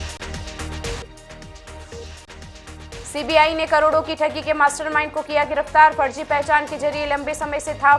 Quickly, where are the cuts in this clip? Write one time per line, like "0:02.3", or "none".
0:00.9